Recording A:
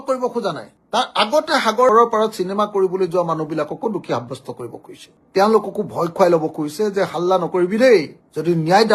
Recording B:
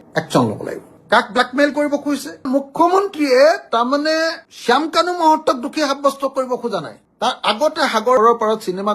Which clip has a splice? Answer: B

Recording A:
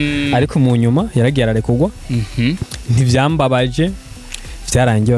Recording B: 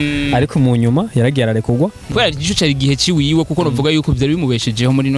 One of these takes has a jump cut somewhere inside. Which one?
B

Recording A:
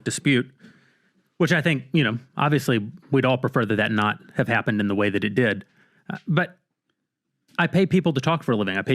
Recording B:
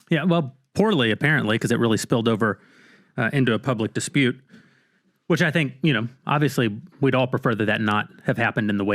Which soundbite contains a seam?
A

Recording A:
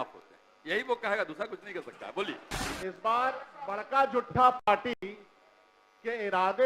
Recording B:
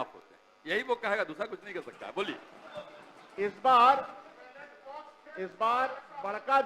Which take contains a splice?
A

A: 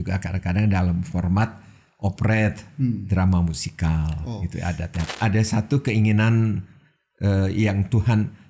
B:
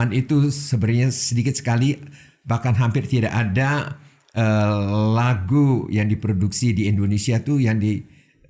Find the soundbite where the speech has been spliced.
A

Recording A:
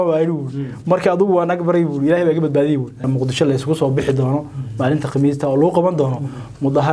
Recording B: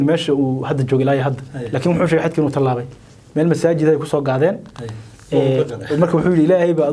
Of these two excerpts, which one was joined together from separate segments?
A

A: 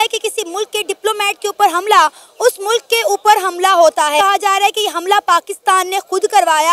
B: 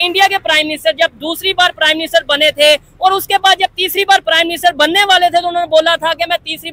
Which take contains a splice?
A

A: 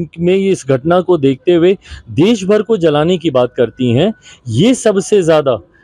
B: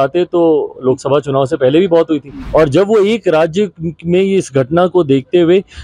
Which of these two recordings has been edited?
B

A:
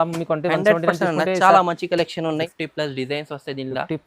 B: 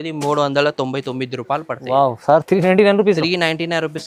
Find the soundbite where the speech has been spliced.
A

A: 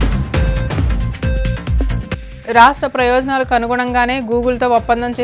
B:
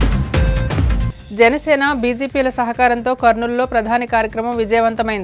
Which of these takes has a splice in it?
B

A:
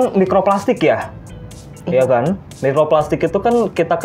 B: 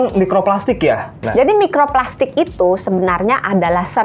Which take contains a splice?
B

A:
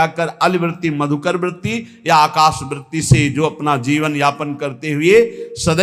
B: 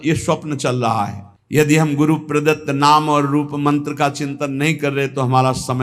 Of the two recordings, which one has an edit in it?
B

